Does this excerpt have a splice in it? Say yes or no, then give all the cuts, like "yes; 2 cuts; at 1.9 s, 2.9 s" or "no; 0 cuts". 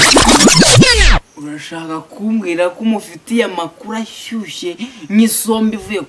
yes; 1 cut; at 1.4 s